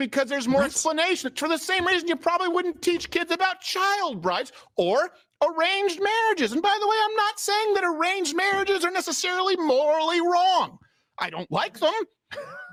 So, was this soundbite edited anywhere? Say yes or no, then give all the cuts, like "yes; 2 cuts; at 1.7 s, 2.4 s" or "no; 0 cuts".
no; 0 cuts